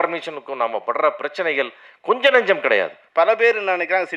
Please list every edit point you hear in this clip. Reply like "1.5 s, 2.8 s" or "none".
3.0 s